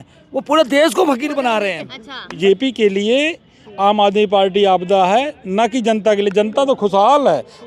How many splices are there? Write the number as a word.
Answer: one